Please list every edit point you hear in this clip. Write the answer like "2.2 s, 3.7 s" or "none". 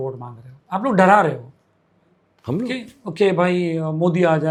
none